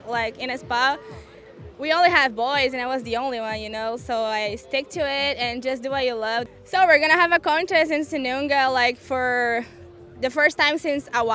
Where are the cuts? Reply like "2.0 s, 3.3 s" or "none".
6.5 s

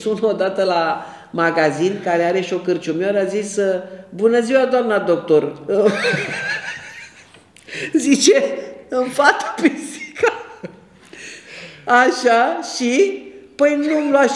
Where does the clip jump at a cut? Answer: none

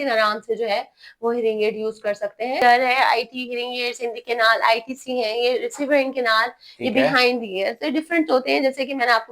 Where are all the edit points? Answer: 2.6 s

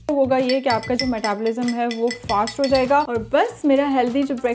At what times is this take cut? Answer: 3.1 s

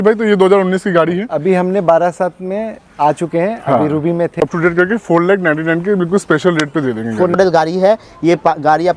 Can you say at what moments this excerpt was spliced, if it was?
4.4 s, 7.4 s

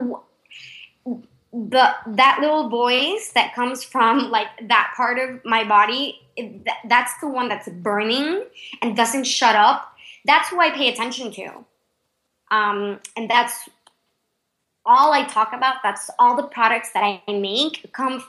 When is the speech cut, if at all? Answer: none

